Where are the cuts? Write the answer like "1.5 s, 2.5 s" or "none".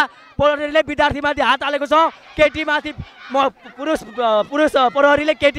none